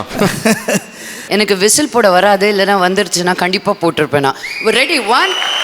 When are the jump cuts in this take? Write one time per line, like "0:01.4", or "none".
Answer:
0:01.2